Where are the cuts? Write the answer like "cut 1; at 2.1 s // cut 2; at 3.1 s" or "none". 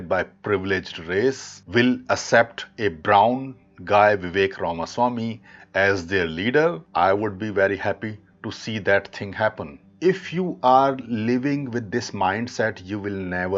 cut 1; at 1.5 s // cut 2; at 6.8 s // cut 3; at 9.8 s